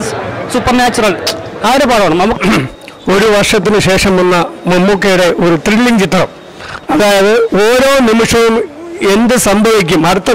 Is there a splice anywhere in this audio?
yes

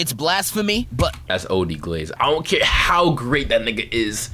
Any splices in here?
no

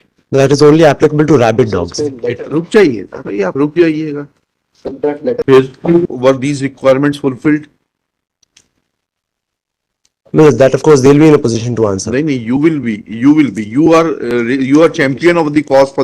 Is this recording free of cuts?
no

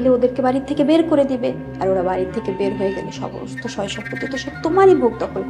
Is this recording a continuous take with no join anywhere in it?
yes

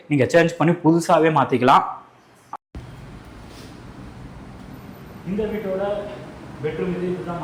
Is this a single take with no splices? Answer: yes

